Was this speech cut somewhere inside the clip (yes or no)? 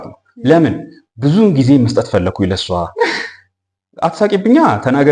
no